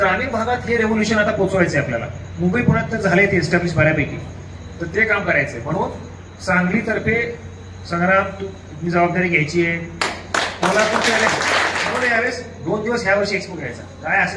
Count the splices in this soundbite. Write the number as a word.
one